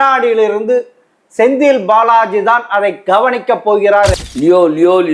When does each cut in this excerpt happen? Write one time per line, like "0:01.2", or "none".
0:04.2